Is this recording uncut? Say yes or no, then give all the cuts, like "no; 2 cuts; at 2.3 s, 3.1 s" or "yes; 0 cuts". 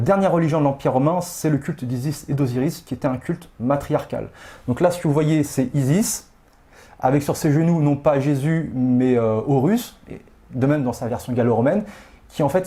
yes; 0 cuts